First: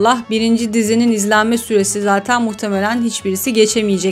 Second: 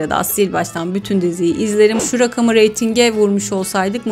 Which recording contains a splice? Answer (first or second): second